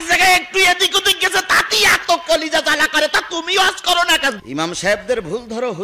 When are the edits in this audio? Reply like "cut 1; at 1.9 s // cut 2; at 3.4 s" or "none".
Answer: cut 1; at 4.4 s

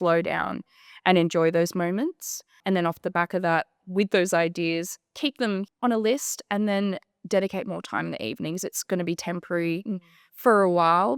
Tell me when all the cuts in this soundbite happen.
cut 1; at 2.6 s // cut 2; at 5.7 s

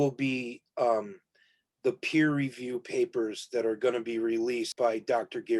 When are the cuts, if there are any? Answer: cut 1; at 4.7 s

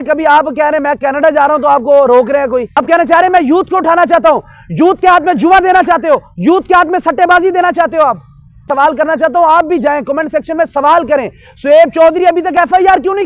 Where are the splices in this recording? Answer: cut 1; at 2.7 s // cut 2; at 8.6 s

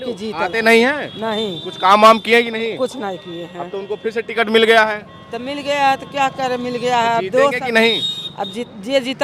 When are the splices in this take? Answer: none

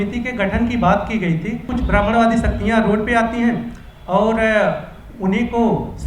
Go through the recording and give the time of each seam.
cut 1; at 1.7 s

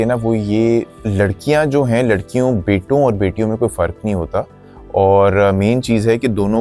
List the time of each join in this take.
cut 1; at 0.9 s

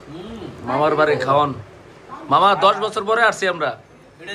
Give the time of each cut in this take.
none

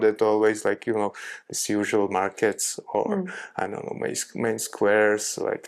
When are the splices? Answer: none

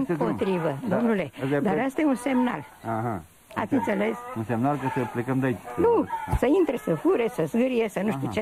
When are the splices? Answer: cut 1; at 4.3 s

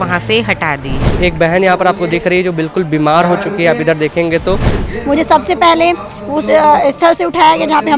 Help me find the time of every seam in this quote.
cut 1; at 1.2 s // cut 2; at 4.8 s

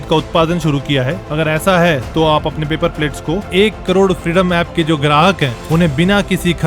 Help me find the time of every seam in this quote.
none

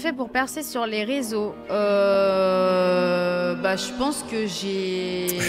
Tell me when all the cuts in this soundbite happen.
none

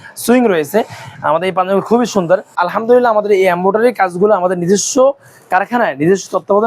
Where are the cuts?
cut 1; at 2.5 s

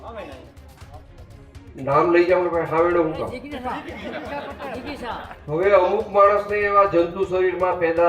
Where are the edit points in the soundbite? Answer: cut 1; at 5.3 s

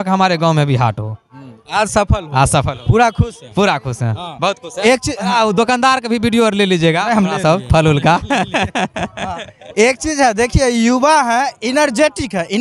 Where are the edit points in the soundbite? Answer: none

